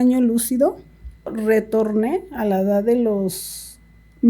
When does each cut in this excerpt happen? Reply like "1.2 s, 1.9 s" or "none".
1.4 s

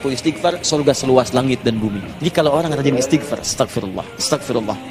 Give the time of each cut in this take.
2.1 s

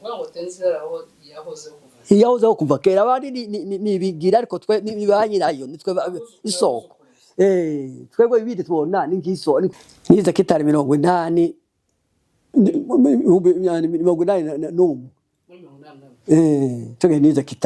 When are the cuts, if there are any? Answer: 9.7 s

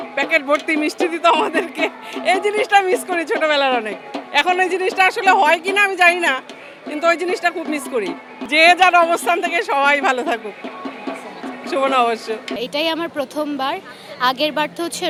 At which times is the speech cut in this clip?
none

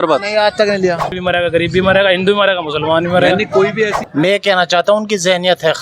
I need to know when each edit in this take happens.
1.1 s, 4.0 s

